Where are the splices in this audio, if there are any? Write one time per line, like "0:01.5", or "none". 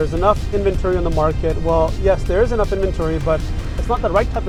none